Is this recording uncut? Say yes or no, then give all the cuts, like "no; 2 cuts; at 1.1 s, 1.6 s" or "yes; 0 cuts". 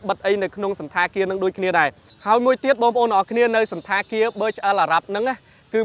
yes; 0 cuts